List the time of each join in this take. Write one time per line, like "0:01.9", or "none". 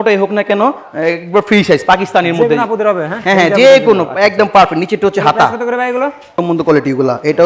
0:06.4